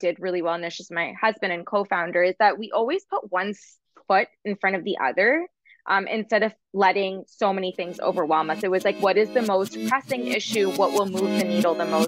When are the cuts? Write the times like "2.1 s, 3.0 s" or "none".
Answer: none